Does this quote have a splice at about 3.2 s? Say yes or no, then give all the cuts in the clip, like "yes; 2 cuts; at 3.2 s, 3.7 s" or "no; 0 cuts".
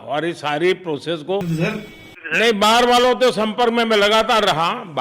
no; 1 cut; at 1.5 s